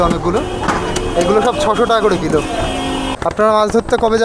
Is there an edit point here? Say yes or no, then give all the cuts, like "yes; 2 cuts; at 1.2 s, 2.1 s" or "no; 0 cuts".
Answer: yes; 1 cut; at 3.2 s